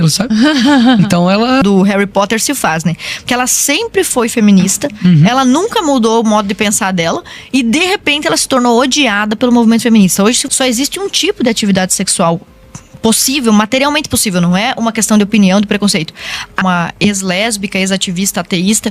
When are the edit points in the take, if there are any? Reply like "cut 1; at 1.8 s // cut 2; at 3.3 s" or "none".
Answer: cut 1; at 1.6 s // cut 2; at 10.4 s // cut 3; at 16.6 s